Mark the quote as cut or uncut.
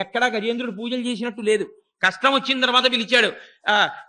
uncut